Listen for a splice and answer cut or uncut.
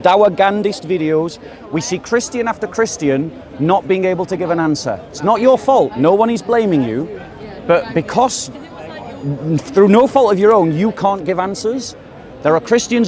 uncut